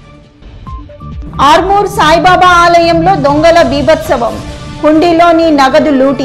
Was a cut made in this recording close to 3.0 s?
no; 1 cut; at 1.1 s

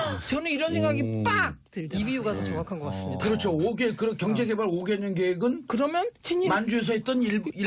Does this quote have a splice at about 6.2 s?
yes; 1 cut; at 6.2 s

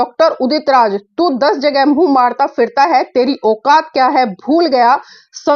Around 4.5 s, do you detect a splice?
no; 0 cuts

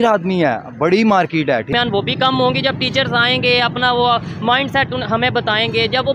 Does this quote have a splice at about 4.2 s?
no; 1 cut; at 1.7 s

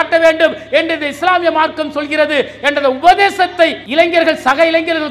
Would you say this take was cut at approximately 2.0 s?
no; 1 cut; at 3.8 s

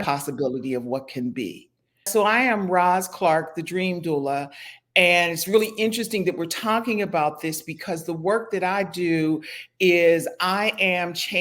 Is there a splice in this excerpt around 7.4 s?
no; 1 cut; at 2.1 s

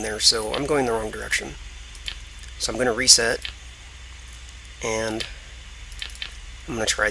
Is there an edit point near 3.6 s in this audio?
yes; 1 cut; at 3.6 s

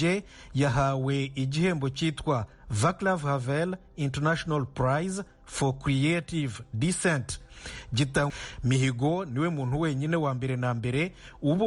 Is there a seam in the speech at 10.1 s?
no; 1 cut; at 8.3 s

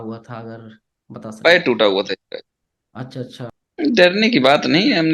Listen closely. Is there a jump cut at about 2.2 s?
no; 1 cut; at 3.5 s

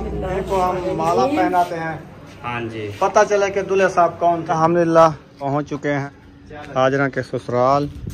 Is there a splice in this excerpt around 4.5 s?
yes; 3 cuts; at 4.5 s, 5.4 s, 6.2 s

